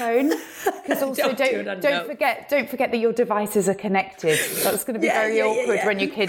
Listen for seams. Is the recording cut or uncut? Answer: uncut